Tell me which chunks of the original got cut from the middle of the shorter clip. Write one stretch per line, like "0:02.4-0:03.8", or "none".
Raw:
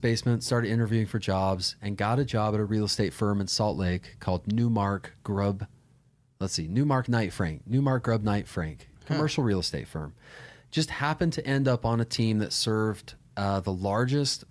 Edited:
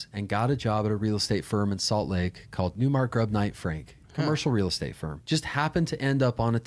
0:04.4-0:07.6
0:10.0-0:10.5